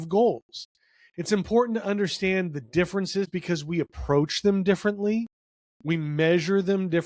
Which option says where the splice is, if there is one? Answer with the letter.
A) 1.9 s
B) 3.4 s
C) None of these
B